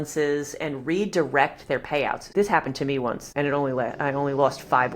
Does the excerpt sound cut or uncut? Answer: cut